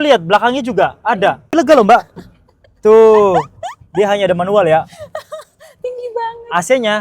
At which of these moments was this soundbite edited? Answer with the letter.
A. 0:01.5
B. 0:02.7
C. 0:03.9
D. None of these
A